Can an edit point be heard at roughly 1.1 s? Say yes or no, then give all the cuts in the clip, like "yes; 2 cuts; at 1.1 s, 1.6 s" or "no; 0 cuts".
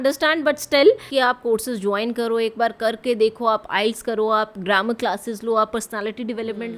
yes; 1 cut; at 1.1 s